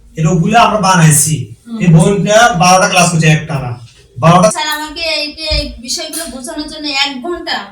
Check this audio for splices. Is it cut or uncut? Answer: cut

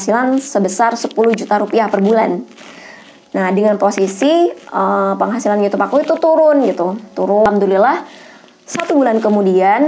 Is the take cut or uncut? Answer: cut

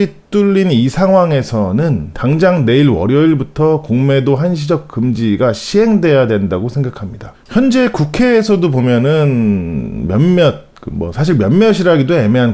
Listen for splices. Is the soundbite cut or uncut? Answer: uncut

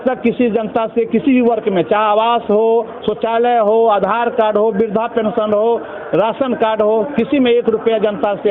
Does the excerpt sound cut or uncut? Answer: uncut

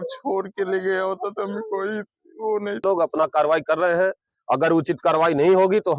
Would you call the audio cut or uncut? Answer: cut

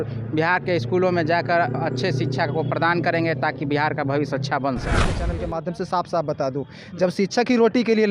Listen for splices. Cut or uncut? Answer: cut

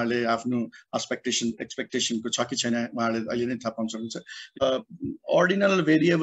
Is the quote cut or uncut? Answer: cut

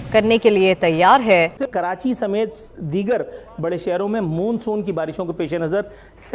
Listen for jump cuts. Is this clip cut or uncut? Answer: cut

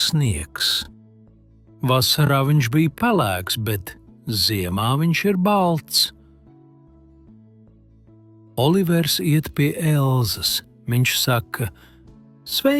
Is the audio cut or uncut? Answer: cut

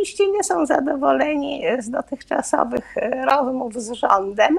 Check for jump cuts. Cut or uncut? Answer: uncut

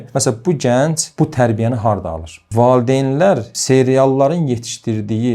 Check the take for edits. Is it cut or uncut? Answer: cut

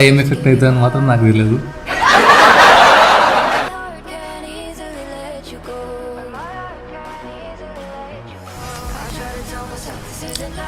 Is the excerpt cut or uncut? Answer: uncut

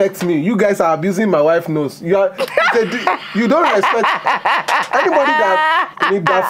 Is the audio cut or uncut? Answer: uncut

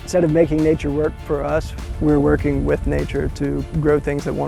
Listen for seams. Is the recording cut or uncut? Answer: uncut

